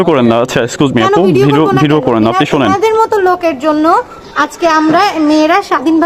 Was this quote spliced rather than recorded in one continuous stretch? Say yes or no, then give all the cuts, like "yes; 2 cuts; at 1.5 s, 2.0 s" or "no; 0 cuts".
no; 0 cuts